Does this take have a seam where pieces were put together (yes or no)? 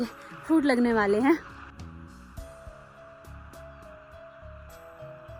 no